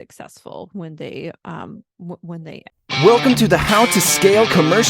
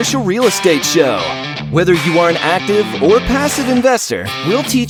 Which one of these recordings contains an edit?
first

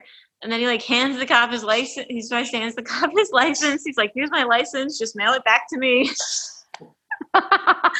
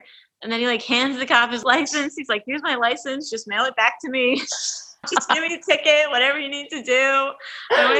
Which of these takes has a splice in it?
second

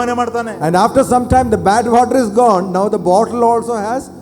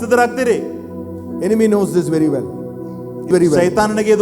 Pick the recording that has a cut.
second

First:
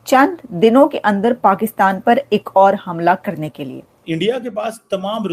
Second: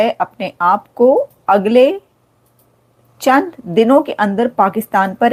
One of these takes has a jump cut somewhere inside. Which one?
first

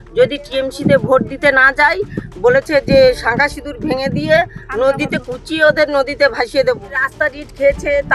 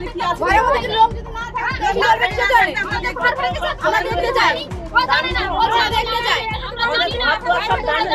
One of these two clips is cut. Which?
first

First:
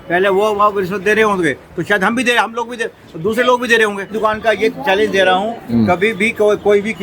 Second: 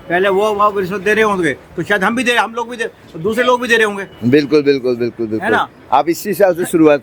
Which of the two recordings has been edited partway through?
first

